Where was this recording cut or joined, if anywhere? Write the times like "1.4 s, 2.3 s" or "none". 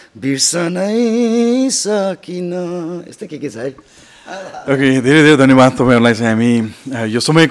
none